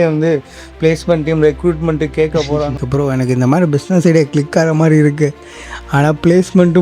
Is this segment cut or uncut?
cut